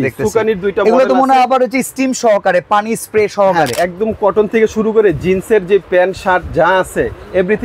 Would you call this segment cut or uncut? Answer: cut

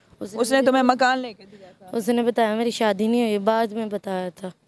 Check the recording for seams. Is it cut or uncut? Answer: uncut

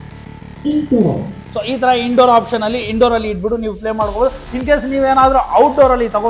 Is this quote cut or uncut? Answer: uncut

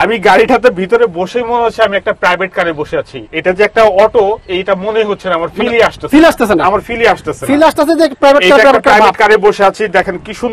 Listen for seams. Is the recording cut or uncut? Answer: uncut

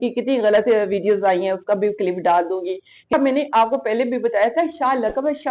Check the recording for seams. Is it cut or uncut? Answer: cut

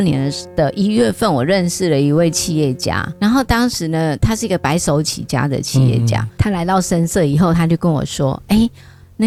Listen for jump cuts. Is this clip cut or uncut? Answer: uncut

